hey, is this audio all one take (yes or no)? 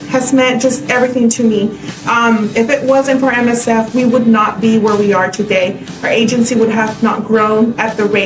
yes